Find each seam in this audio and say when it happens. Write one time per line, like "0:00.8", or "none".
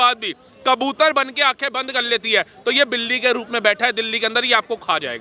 none